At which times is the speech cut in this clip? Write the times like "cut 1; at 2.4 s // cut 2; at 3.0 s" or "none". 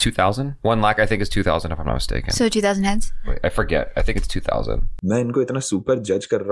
cut 1; at 4.9 s

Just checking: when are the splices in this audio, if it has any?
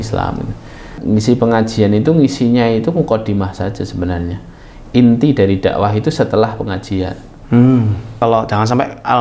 cut 1; at 1.0 s // cut 2; at 8.2 s

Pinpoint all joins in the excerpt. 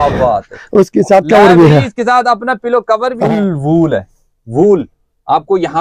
cut 1; at 3.2 s

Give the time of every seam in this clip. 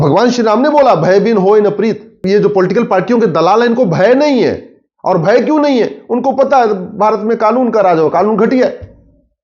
cut 1; at 2.2 s

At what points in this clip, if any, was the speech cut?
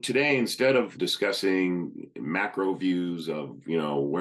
cut 1; at 0.9 s

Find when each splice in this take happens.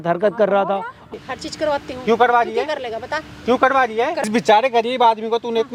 cut 1; at 1.0 s // cut 2; at 4.2 s

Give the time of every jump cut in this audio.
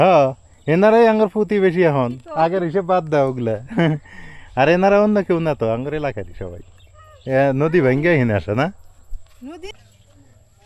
cut 1; at 9.7 s

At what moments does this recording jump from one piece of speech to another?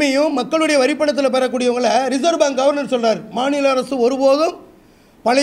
none

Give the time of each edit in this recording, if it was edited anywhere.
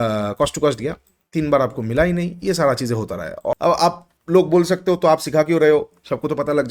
cut 1; at 3.5 s

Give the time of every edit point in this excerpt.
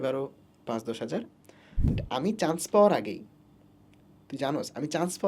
cut 1; at 2.0 s

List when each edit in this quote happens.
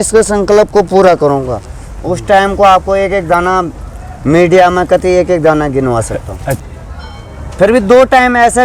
cut 1; at 6.6 s

